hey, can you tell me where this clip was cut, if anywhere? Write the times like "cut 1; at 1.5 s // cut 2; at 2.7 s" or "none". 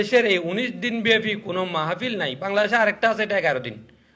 none